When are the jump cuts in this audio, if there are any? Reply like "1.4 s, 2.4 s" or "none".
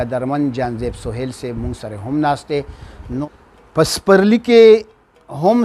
3.2 s